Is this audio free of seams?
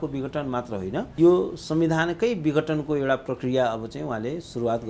no; 1 cut; at 1.1 s

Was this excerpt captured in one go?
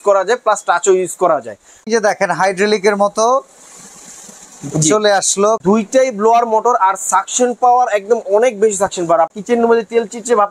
no; 3 cuts; at 1.9 s, 5.6 s, 9.3 s

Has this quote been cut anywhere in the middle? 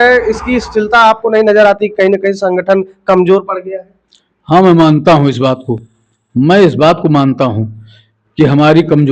no; 0 cuts

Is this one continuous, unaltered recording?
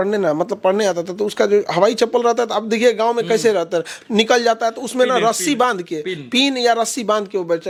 yes; 0 cuts

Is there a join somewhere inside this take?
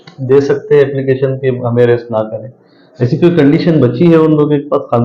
no; 0 cuts

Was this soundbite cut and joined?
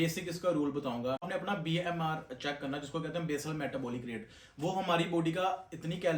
yes; 1 cut; at 1.3 s

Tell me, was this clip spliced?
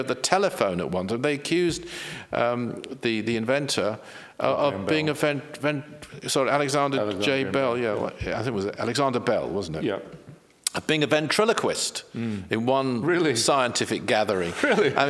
no; 0 cuts

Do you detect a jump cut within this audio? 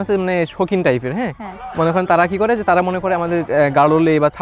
no; 0 cuts

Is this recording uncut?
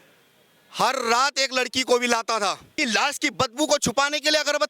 no; 1 cut; at 2.7 s

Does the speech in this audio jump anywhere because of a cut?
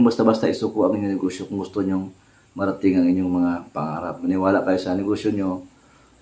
yes; 1 cut; at 4.2 s

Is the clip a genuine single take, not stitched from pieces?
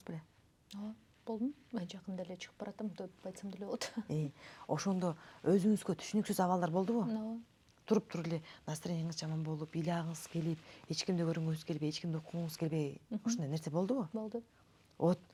yes; 0 cuts

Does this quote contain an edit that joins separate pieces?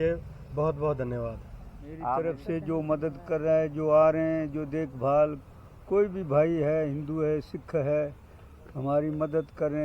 yes; 1 cut; at 2.1 s

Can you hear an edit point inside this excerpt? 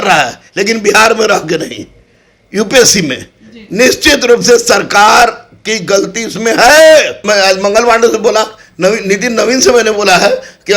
yes; 1 cut; at 7.2 s

